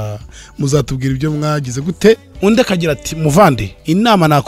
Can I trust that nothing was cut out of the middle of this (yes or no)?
no